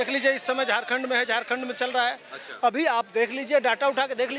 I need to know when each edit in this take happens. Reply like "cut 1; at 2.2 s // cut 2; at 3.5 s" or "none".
none